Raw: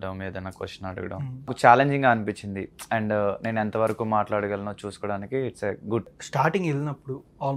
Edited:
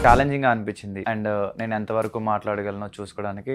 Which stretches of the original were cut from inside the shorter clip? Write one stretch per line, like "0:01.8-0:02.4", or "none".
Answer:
0:02.5-0:02.8